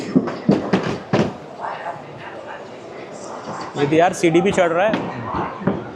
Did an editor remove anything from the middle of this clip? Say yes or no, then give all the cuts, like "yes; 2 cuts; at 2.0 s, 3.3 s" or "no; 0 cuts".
no; 0 cuts